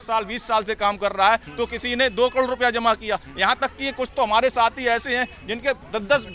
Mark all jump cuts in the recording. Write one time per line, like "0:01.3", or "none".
none